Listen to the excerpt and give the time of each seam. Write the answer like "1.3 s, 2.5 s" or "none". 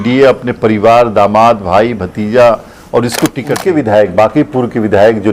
3.5 s